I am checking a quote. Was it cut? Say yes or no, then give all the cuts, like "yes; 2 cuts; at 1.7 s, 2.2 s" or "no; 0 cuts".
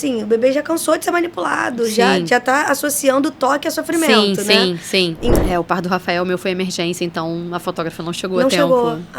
yes; 1 cut; at 5.3 s